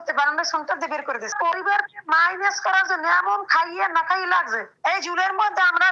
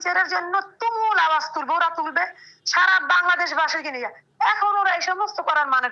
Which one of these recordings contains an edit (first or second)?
first